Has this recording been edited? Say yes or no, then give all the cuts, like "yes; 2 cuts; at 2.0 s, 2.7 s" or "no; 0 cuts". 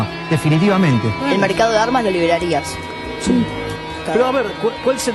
no; 0 cuts